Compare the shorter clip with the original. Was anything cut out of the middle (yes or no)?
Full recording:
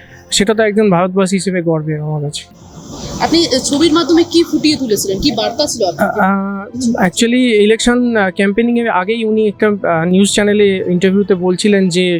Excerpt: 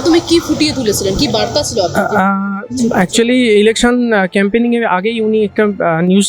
no